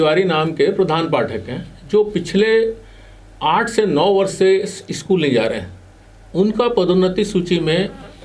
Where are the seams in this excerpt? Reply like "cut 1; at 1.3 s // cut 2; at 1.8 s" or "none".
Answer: none